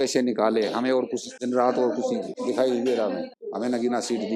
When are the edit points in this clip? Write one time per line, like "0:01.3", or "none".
0:01.3
0:02.3
0:03.3